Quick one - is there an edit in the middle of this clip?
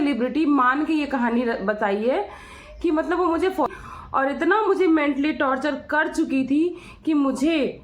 yes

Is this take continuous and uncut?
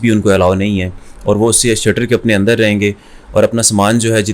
yes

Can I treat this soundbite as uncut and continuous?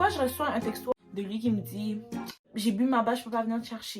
no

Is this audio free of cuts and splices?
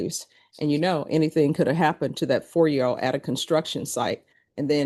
yes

